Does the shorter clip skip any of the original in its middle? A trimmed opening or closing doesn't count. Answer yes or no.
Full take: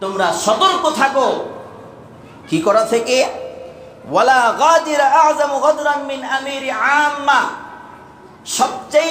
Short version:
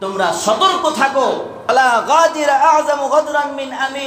yes